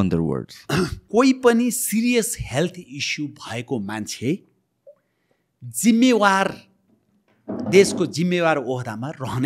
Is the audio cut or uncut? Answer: cut